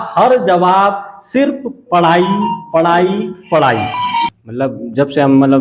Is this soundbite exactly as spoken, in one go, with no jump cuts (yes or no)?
no